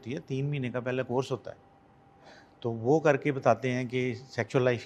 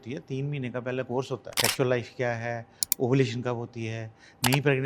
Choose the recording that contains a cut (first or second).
second